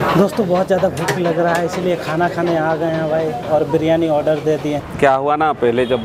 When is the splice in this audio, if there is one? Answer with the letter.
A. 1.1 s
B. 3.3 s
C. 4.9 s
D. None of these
C